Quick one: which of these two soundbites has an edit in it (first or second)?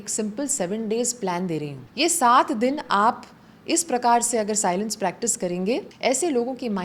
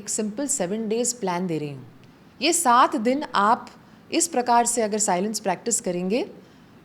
first